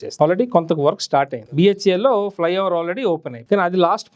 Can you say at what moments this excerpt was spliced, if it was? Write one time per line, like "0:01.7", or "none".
0:01.4
0:03.3